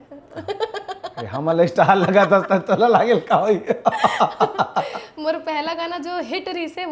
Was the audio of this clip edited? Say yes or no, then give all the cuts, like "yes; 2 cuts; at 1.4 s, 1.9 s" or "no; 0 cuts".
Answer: no; 0 cuts